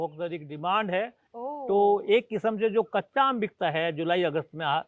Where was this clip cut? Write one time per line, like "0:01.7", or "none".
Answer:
0:01.3